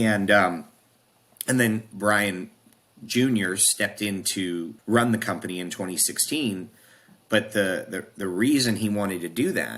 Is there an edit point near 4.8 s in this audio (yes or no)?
yes